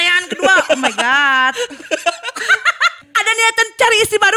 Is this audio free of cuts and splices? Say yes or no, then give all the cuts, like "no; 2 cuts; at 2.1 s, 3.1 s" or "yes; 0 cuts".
no; 1 cut; at 3.0 s